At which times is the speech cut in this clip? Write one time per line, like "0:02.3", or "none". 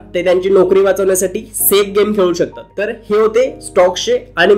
0:02.7